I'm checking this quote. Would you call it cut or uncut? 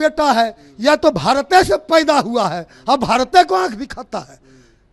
uncut